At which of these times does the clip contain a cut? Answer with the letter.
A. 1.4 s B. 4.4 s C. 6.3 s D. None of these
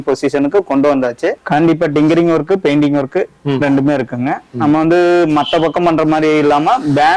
A